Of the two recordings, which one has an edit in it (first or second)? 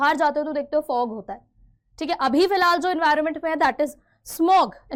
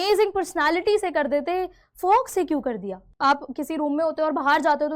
second